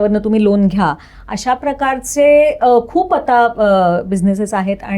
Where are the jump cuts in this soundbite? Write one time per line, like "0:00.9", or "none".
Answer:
none